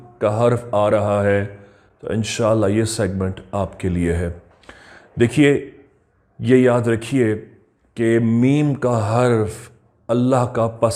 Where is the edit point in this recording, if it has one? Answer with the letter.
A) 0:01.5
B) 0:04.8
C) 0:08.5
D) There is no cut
D